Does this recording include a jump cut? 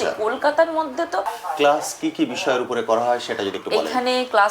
yes; 1 cut; at 1.3 s

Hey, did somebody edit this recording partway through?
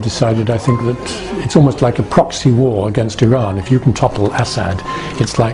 no; 0 cuts

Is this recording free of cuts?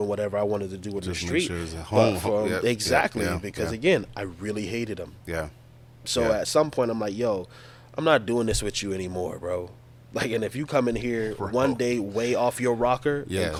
yes; 0 cuts

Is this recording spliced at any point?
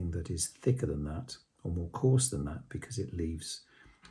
no; 0 cuts

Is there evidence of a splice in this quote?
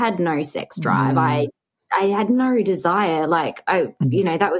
no; 0 cuts

